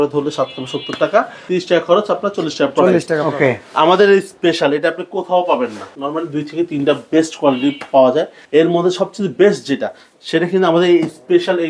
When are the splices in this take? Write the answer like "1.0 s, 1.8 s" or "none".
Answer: 1.4 s, 3.2 s, 5.9 s, 8.4 s